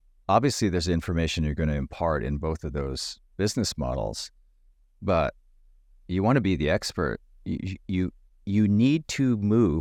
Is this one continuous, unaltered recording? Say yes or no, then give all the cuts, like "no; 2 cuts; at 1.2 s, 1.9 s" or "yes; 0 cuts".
yes; 0 cuts